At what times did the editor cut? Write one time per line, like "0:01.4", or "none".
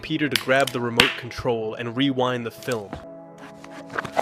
0:03.1